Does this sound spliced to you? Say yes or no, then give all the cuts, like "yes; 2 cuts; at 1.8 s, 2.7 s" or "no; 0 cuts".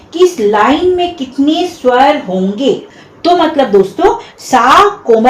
yes; 1 cut; at 2.9 s